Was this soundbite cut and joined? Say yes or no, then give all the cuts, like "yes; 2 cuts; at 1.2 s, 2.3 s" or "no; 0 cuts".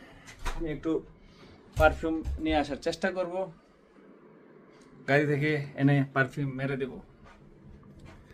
no; 0 cuts